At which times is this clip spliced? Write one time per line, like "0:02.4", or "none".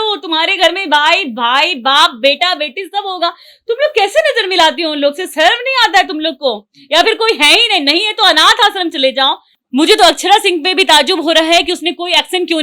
0:09.5